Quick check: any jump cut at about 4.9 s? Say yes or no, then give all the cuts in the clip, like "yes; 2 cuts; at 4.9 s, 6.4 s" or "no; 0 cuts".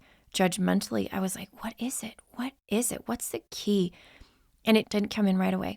yes; 1 cut; at 4.9 s